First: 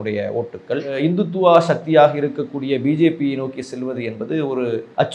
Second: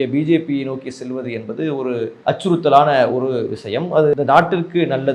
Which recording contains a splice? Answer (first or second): second